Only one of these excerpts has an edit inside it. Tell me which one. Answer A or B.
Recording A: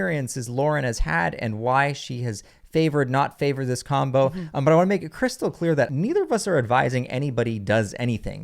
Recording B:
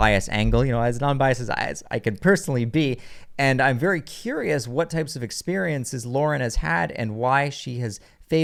A